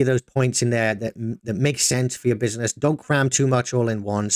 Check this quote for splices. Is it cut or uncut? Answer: uncut